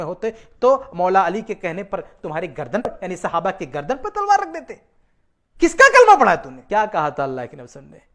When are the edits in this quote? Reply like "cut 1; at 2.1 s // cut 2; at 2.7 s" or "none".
cut 1; at 2.9 s // cut 2; at 6.5 s